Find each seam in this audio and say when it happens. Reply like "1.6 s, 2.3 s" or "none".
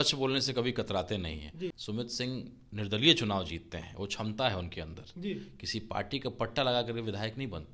1.8 s